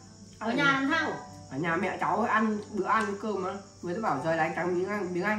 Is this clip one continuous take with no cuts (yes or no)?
yes